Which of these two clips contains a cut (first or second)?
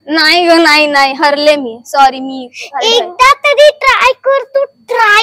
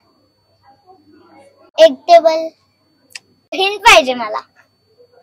second